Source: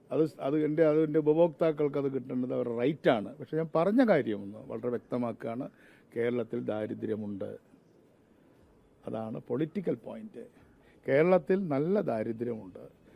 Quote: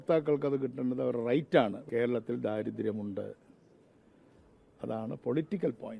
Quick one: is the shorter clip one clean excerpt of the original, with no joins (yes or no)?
no